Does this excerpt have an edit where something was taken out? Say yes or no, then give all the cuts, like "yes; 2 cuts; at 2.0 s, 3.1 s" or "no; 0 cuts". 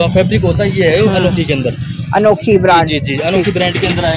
no; 0 cuts